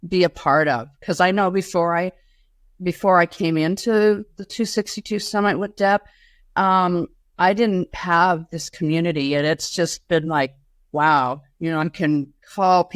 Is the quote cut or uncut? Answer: uncut